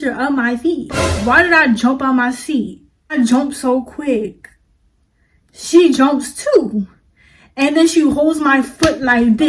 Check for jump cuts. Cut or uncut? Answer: cut